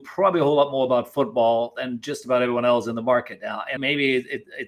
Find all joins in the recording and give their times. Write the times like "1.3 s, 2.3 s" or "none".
3.7 s